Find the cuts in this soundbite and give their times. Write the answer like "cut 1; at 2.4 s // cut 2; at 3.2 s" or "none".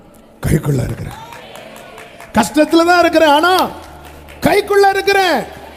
none

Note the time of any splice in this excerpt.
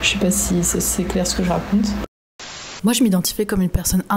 cut 1; at 2.4 s

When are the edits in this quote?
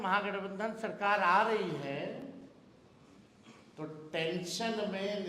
none

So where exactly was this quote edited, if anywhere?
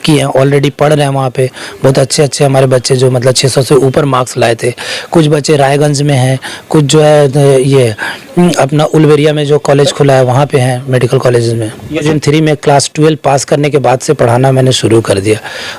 cut 1; at 12.0 s

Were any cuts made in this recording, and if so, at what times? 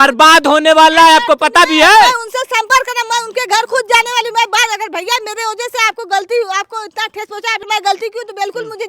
cut 1; at 7.6 s

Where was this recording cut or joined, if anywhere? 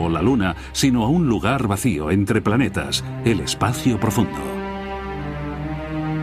cut 1; at 3.2 s

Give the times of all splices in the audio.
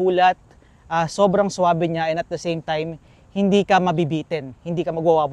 none

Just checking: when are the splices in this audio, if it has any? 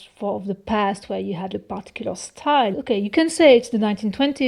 cut 1; at 1.6 s // cut 2; at 2.7 s

